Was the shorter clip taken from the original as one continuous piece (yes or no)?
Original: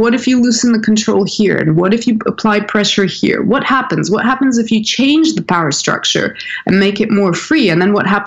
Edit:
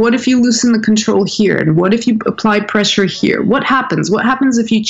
yes